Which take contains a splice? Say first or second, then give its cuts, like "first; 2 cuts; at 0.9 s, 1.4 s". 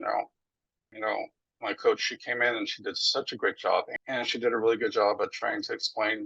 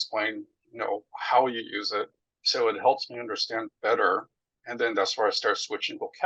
first; 2 cuts; at 0.9 s, 3.9 s